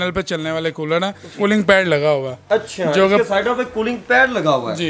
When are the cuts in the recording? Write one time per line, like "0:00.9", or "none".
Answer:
0:01.2